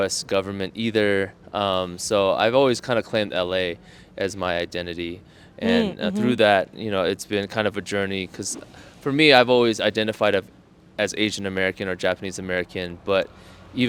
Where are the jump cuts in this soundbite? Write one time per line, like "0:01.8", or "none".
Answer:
none